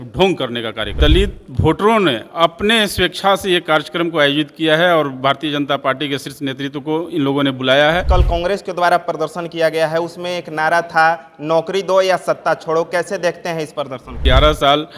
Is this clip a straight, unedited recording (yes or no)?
no